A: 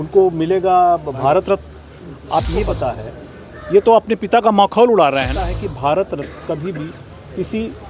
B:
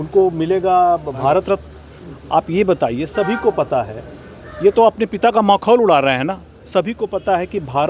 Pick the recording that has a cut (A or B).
A